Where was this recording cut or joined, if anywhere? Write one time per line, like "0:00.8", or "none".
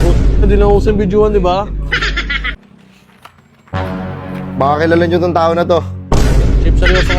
0:02.6

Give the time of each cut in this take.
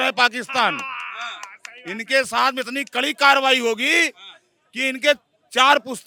none

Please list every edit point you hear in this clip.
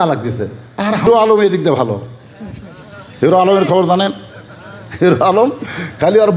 0:01.1

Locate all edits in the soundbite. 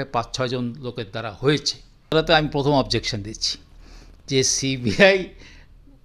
0:02.1

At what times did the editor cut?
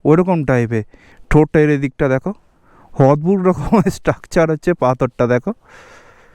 none

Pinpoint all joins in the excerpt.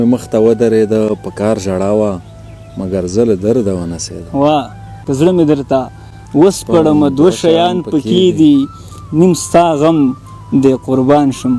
0:05.0

